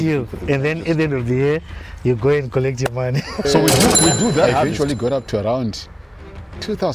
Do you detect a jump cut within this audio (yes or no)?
yes